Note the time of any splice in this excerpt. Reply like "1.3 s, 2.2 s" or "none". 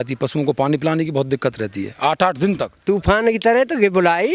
2.8 s